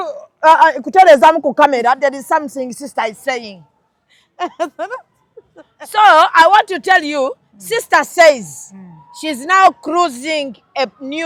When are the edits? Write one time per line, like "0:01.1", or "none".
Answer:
none